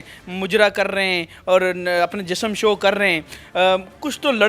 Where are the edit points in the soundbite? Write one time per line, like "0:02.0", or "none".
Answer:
none